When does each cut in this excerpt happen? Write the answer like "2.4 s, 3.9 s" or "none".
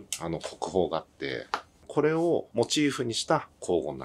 1.9 s

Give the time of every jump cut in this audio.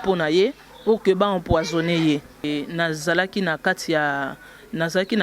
2.4 s

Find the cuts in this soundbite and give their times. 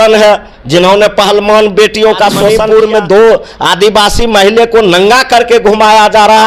2.5 s

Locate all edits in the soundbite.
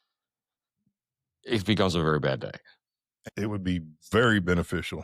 3.2 s

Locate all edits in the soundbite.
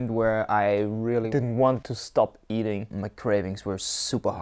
1.3 s, 1.9 s, 2.9 s

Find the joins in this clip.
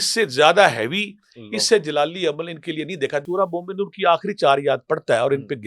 3.2 s

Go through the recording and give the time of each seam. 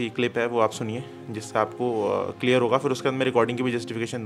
none

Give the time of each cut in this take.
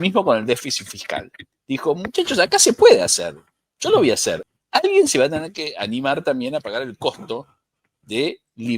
4.5 s

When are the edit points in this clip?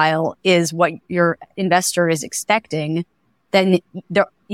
1.1 s

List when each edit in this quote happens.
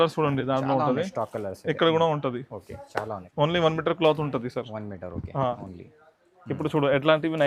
3.1 s

